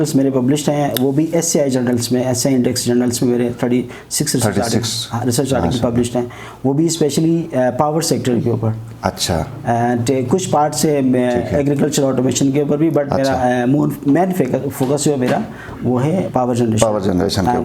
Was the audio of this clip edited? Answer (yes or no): no